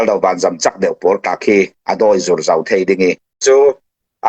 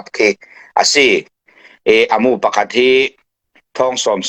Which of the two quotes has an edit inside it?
first; 1 cut; at 3.3 s

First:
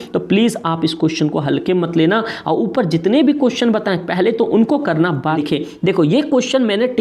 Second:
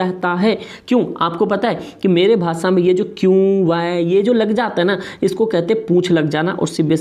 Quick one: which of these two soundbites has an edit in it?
first; 1 cut; at 5.3 s

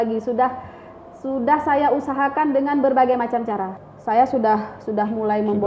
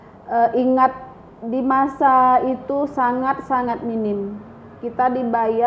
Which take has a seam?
first; 1 cut; at 3.7 s

